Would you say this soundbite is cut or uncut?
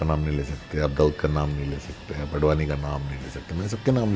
uncut